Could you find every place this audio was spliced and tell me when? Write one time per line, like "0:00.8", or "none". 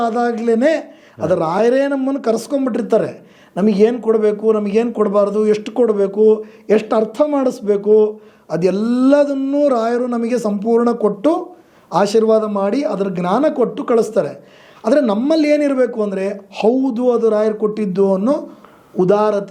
none